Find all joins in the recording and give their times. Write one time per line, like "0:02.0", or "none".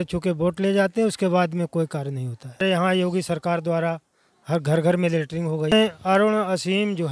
0:02.6
0:05.7

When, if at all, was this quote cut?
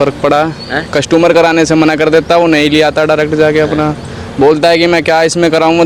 none

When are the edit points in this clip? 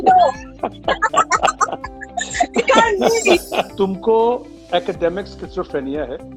0:03.7

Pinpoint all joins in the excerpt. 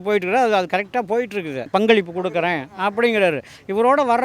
0:01.7

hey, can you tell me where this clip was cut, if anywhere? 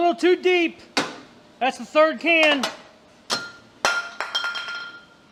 none

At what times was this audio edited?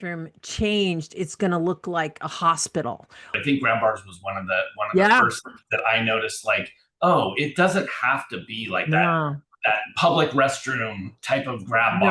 0:03.3

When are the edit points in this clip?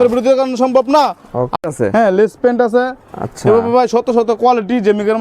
0:01.6

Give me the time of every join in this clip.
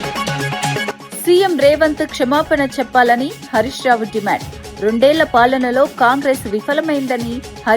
0:01.1

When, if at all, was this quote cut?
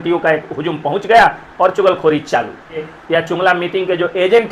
0:02.9

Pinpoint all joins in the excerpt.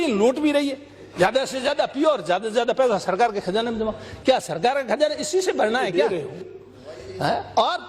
0:06.1

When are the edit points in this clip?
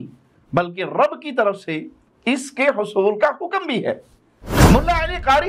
0:04.5

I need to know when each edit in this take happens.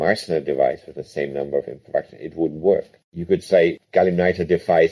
none

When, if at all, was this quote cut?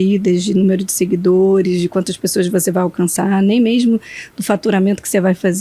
none

